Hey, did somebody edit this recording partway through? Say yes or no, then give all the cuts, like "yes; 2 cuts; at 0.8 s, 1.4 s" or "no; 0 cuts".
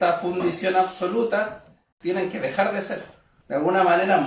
yes; 1 cut; at 1.9 s